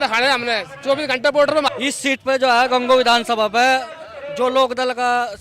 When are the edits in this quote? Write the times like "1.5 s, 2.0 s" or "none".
1.7 s